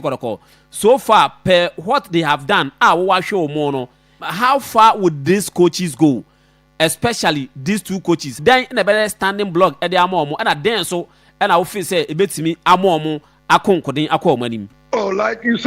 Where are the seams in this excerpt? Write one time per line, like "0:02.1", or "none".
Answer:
0:04.2
0:08.4
0:14.7